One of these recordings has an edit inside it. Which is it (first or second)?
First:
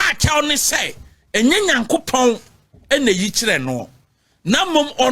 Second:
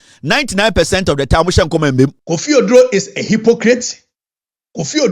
second